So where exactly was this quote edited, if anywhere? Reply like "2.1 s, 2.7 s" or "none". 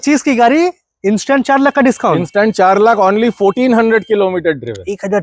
none

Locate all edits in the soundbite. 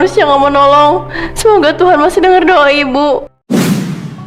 3.3 s

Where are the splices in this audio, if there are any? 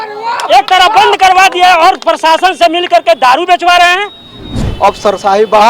4.6 s

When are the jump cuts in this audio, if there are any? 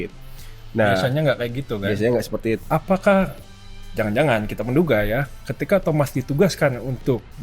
2.6 s

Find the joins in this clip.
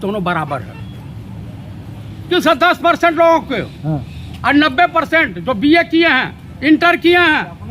2.2 s

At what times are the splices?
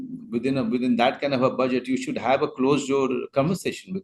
none

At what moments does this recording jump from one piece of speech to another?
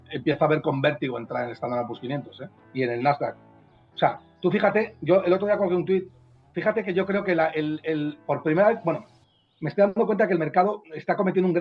none

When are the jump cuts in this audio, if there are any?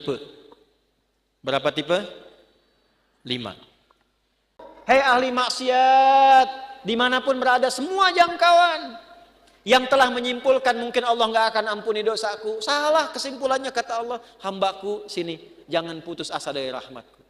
4.7 s

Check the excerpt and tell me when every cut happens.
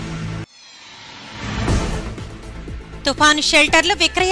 2.1 s

